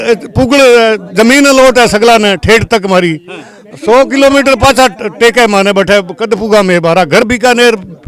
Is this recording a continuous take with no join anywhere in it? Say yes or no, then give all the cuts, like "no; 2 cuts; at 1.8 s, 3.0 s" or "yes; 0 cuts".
yes; 0 cuts